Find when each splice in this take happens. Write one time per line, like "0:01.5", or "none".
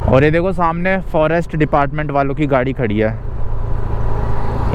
none